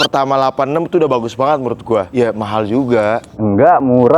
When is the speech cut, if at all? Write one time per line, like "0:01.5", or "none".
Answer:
0:02.1